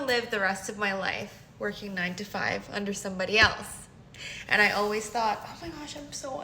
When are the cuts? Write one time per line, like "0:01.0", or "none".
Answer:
none